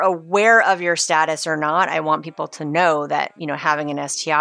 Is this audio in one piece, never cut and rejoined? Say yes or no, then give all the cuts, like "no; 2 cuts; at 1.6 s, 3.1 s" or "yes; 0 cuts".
yes; 0 cuts